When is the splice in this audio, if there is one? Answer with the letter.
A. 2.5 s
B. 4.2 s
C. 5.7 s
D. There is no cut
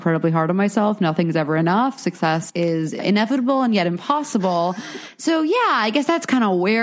A